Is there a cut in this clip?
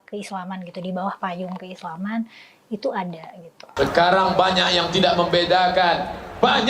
yes; 1 cut; at 3.6 s

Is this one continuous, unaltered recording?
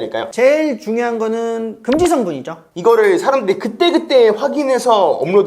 no; 1 cut; at 2.7 s

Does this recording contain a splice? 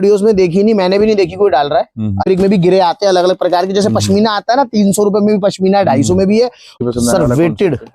yes; 2 cuts; at 2.2 s, 6.7 s

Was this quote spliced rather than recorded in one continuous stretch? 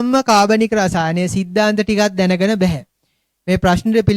no; 0 cuts

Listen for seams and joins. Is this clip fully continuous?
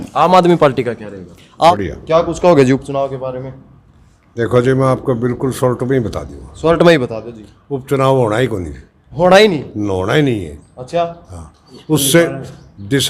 no; 1 cut; at 1.7 s

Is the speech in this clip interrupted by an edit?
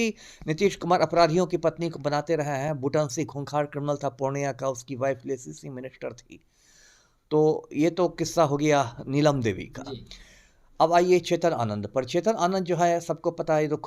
no; 0 cuts

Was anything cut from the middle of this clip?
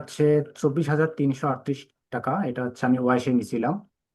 no; 0 cuts

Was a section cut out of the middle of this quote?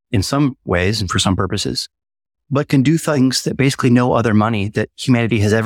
no; 0 cuts

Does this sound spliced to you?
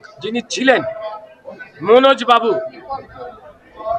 no; 0 cuts

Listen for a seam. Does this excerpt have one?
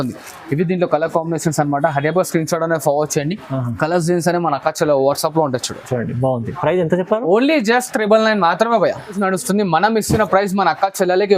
yes; 1 cut; at 9.2 s

